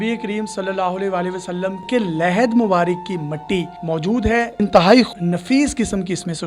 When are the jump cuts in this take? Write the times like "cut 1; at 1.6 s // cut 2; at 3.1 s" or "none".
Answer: cut 1; at 1.8 s // cut 2; at 4.5 s // cut 3; at 5.1 s